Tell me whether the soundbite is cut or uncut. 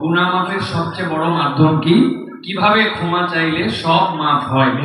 uncut